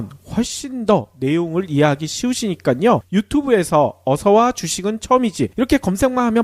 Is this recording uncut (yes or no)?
yes